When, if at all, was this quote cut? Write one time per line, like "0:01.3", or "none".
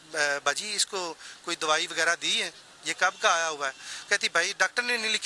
none